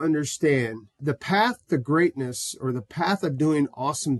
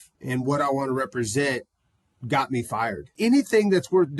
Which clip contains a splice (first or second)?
second